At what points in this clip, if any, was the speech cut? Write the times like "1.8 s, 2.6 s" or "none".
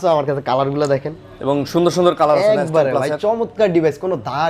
none